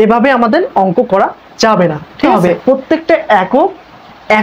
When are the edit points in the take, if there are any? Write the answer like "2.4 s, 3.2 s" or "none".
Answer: 2.6 s